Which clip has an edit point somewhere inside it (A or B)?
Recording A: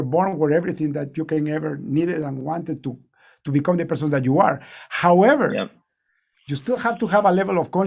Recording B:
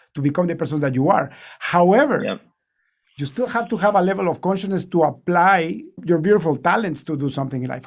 B